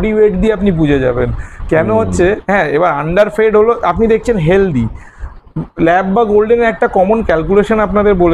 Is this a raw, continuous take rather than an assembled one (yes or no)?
yes